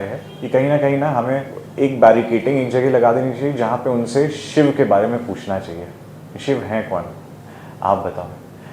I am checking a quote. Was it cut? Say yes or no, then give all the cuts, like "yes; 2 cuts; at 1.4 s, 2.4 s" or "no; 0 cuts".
no; 0 cuts